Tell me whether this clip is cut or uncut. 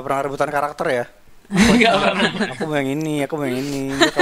uncut